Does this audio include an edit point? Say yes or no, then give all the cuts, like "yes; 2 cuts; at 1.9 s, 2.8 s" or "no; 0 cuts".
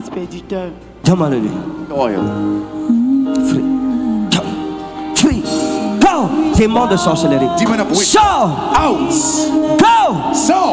no; 0 cuts